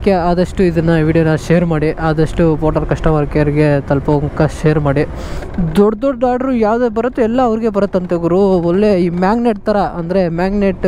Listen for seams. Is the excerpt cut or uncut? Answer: cut